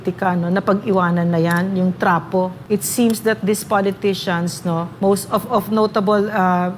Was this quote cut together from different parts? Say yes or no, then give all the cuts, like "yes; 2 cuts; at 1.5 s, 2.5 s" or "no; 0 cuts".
yes; 2 cuts; at 2.6 s, 4.9 s